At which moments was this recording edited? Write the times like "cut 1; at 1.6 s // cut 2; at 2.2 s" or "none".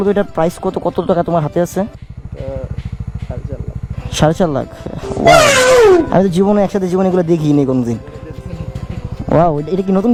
none